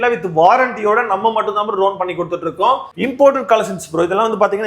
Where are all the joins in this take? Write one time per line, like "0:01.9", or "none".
0:02.9